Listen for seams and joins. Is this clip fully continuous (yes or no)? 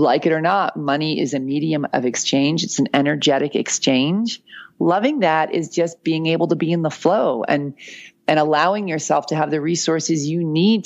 yes